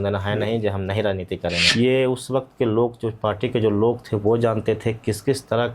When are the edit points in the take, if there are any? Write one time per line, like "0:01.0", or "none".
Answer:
0:01.6

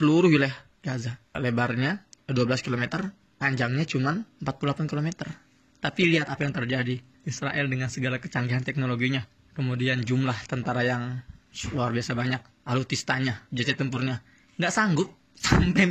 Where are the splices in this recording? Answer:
0:12.5
0:13.4

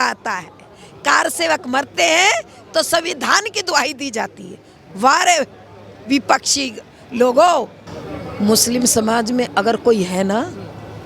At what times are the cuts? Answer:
0:07.8

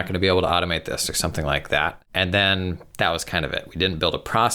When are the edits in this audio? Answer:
0:02.0

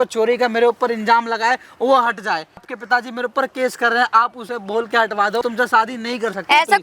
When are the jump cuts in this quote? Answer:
0:02.7
0:05.4

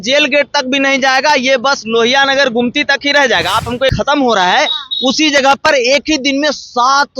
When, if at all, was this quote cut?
0:03.9

